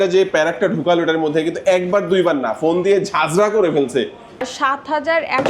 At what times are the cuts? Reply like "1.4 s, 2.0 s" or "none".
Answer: 4.4 s